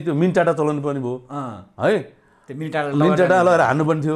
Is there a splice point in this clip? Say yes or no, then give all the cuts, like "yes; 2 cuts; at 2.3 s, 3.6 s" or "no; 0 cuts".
no; 0 cuts